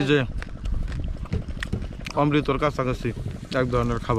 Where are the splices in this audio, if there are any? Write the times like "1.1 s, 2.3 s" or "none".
none